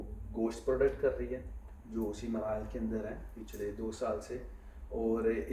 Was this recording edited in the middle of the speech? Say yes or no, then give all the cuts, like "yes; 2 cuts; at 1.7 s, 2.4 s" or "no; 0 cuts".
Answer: no; 0 cuts